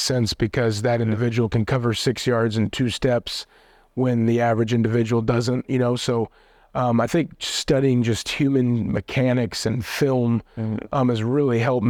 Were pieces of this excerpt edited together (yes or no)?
no